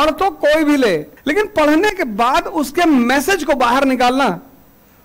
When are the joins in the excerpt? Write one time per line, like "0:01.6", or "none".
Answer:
0:01.1